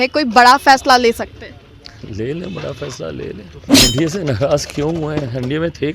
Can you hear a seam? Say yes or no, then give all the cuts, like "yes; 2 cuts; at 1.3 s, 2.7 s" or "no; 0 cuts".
yes; 1 cut; at 3.8 s